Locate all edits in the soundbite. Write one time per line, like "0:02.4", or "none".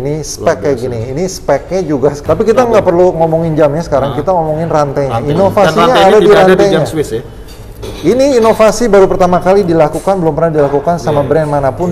0:02.2